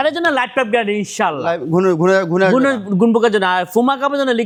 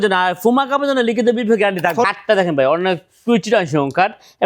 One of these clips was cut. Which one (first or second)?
second